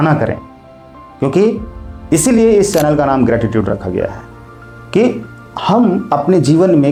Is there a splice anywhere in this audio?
no; 0 cuts

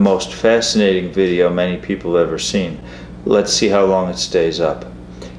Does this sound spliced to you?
no; 0 cuts

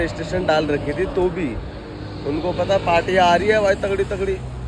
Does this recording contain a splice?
no; 0 cuts

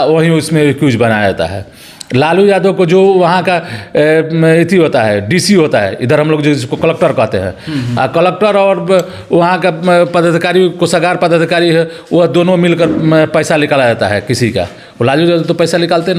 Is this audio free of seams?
yes; 0 cuts

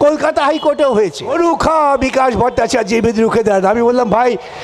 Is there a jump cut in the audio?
yes; 1 cut; at 1.3 s

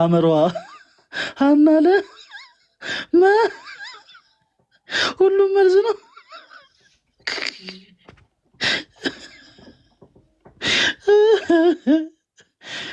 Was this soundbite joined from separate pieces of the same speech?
no; 0 cuts

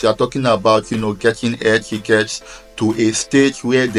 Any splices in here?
no; 0 cuts

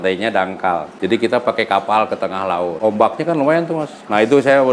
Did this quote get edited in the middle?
yes; 2 cuts; at 0.9 s, 2.7 s

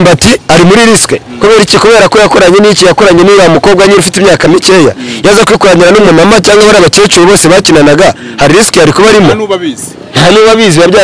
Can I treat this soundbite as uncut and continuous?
yes; 0 cuts

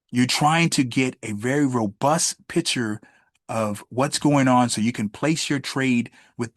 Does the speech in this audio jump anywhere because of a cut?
no; 0 cuts

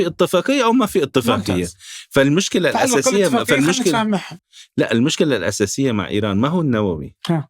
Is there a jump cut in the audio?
no; 0 cuts

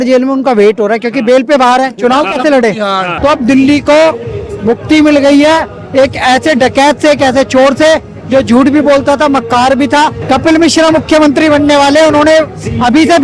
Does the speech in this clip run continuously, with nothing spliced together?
no; 2 cuts; at 3.1 s, 10.2 s

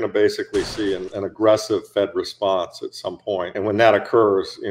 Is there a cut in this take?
yes; 2 cuts; at 1.1 s, 3.5 s

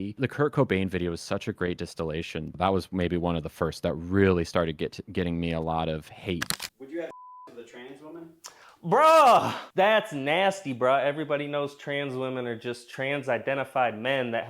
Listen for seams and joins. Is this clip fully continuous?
no; 2 cuts; at 6.5 s, 9.6 s

